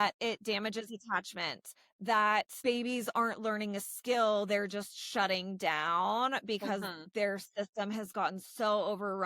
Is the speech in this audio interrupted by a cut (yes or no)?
yes